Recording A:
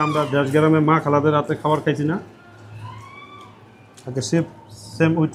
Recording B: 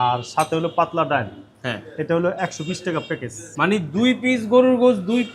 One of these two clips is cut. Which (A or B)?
B